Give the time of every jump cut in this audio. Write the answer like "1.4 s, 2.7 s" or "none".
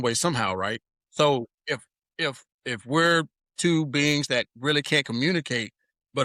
1.0 s, 2.5 s, 3.4 s